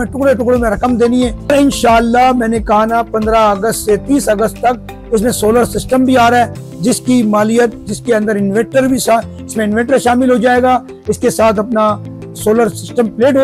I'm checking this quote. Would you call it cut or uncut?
cut